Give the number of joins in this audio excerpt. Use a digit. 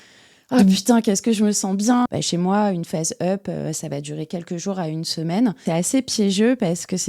2